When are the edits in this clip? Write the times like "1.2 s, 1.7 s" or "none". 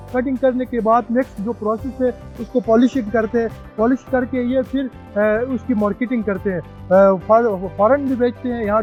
none